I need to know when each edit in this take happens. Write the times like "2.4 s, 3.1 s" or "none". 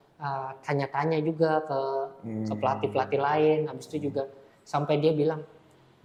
none